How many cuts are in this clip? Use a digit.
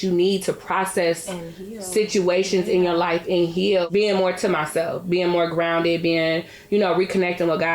1